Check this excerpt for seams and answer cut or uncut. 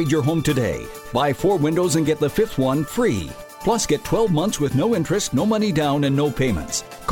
uncut